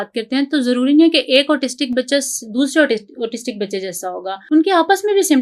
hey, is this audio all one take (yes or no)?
no